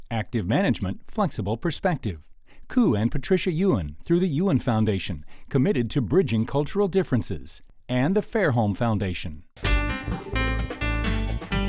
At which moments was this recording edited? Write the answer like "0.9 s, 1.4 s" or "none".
9.5 s